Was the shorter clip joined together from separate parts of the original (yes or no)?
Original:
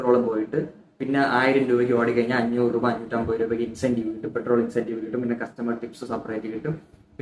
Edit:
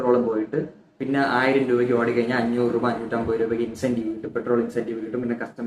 no